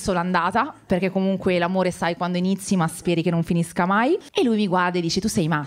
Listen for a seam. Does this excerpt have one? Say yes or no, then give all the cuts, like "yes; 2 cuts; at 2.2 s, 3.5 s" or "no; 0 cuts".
yes; 1 cut; at 4.3 s